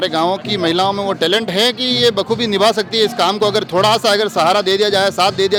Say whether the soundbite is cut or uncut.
uncut